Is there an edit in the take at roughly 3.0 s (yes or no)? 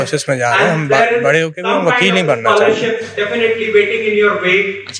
no